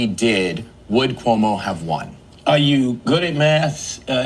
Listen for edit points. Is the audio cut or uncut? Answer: uncut